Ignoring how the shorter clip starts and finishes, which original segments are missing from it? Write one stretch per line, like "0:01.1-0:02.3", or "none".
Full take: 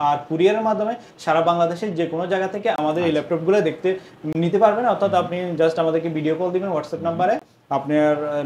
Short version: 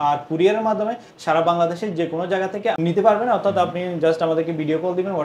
0:02.8-0:04.3